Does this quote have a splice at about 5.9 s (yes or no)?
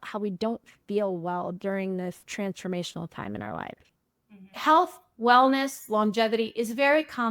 no